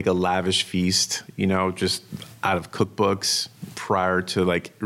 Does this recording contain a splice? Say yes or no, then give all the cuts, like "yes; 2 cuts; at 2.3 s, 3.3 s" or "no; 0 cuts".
no; 0 cuts